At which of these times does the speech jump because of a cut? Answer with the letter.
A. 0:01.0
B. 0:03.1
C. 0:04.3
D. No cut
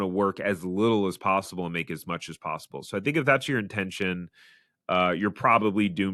D